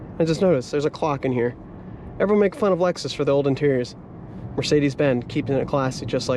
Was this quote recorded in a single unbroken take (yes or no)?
yes